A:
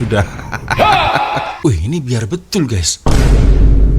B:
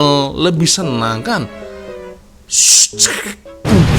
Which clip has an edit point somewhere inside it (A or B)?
A